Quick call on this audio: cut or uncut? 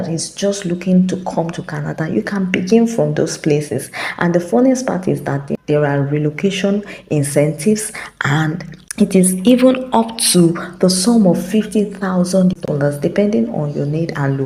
uncut